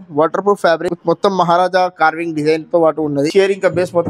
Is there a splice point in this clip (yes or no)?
yes